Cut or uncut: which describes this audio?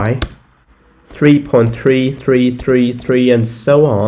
uncut